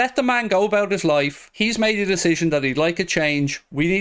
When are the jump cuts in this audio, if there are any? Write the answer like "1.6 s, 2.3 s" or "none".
1.4 s